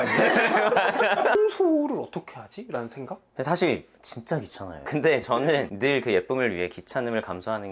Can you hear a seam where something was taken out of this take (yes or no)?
yes